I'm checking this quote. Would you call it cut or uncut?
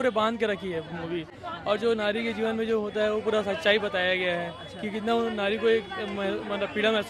uncut